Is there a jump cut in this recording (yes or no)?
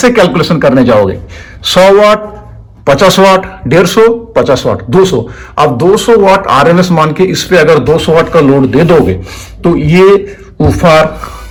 no